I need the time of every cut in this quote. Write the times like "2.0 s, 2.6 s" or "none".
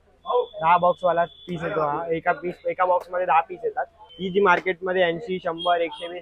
4.0 s